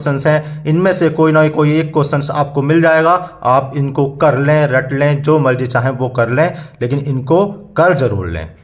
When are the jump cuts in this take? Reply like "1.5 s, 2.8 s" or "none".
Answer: none